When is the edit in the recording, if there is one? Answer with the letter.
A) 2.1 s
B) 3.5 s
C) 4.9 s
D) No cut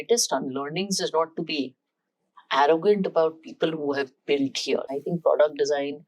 C